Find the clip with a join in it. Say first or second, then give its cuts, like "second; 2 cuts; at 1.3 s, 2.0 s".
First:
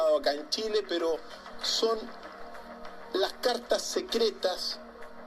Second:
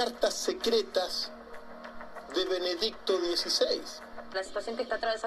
second; 1 cut; at 4.4 s